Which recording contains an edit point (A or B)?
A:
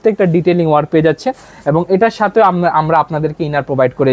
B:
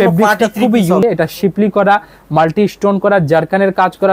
B